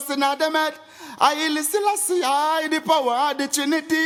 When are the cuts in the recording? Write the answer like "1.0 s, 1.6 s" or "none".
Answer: none